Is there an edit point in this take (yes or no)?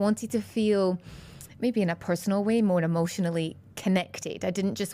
no